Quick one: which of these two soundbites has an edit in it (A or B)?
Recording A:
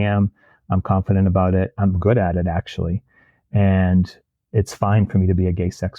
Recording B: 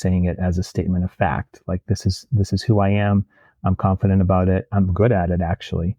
A